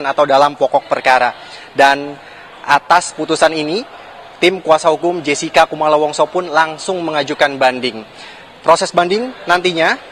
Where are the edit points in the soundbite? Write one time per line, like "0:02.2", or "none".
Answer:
0:04.5

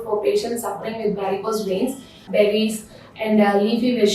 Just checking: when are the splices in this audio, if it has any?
0:02.2

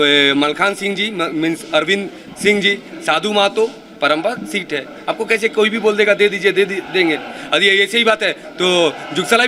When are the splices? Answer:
none

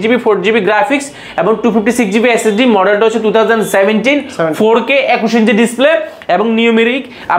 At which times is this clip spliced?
none

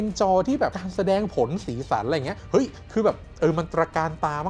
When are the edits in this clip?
0:02.4

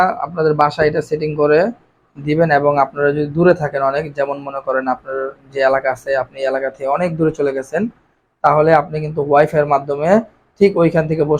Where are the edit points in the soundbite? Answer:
none

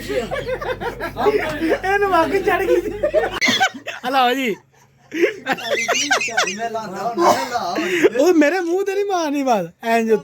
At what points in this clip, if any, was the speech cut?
0:03.3

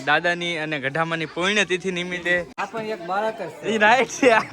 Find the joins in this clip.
0:02.6

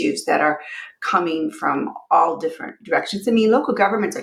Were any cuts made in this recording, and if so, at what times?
none

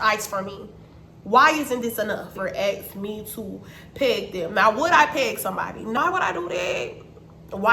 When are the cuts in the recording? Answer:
0:02.3
0:06.0

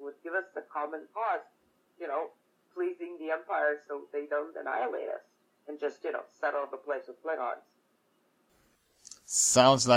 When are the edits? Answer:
0:08.8

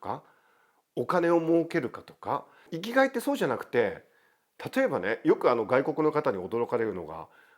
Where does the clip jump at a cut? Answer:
0:02.8

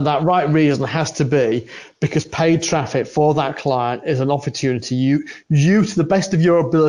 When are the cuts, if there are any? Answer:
none

